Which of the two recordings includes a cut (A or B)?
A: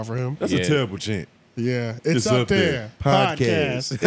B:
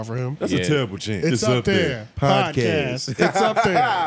B